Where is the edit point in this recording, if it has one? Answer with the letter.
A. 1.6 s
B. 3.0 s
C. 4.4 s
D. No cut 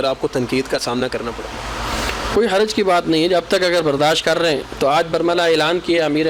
D